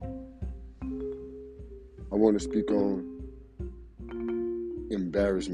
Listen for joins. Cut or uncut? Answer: cut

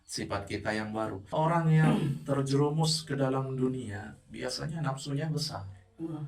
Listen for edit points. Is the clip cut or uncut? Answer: cut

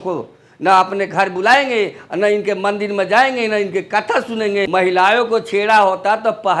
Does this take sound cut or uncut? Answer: cut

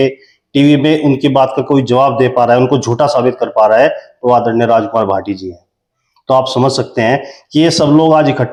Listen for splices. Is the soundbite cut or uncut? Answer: uncut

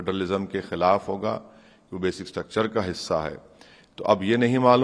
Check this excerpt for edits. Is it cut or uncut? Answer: uncut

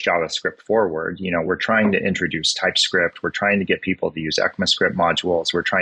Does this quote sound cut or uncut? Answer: uncut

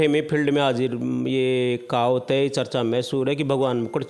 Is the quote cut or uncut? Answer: uncut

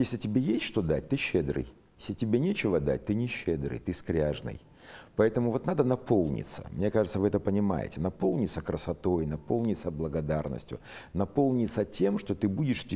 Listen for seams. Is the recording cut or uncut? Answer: uncut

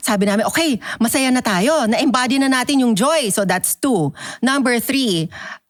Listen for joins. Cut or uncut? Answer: uncut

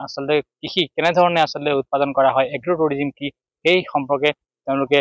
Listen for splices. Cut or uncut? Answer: uncut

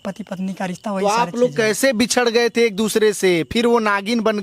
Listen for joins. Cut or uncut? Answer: uncut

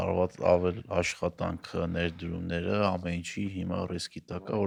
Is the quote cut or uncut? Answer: uncut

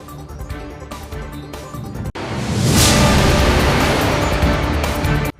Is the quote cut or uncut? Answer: cut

